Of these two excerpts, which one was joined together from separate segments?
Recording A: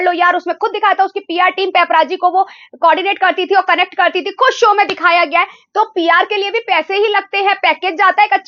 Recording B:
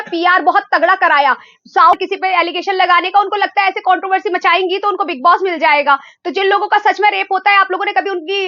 B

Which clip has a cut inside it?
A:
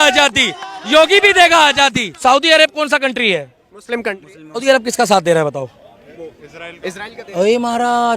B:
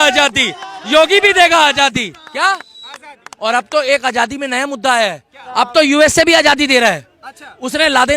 A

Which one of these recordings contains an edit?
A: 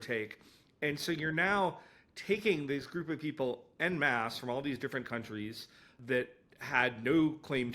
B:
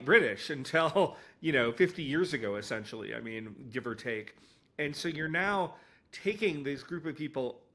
A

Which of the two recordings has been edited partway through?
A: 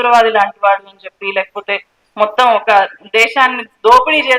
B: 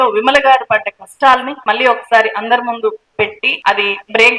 B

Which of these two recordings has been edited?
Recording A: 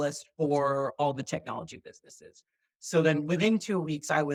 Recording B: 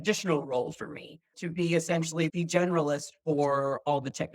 B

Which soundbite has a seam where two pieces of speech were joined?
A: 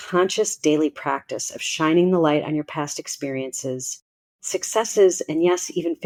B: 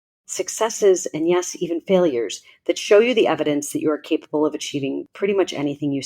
B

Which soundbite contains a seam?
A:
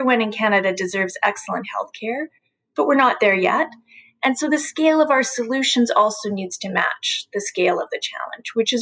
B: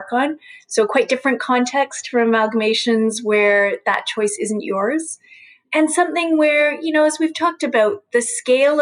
B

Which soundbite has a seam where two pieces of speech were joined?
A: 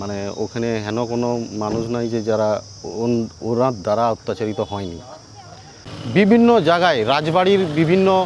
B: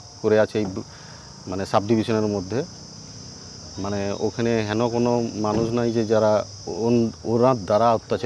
A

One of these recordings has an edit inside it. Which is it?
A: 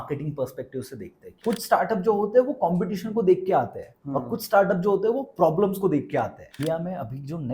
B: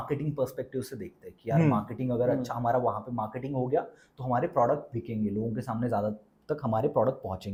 A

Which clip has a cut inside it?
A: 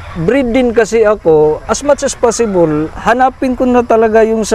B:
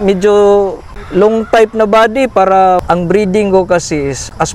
B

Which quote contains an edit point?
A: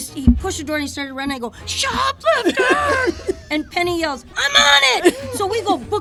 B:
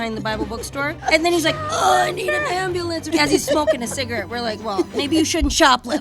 B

